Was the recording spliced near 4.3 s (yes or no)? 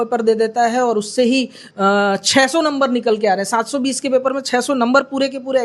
no